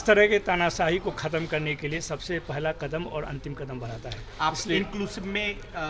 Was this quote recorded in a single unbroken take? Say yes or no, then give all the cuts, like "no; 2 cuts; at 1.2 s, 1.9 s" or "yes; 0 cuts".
yes; 0 cuts